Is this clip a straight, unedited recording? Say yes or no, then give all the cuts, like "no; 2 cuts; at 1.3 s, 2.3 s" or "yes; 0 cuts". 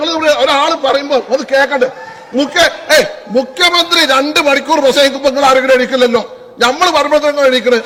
yes; 0 cuts